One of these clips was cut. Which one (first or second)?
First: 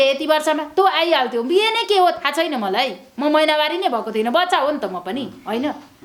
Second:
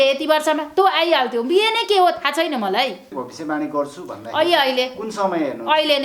second